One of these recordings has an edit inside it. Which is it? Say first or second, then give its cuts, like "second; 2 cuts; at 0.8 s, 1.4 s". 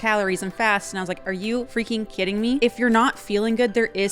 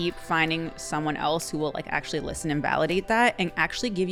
first; 2 cuts; at 1.7 s, 2.6 s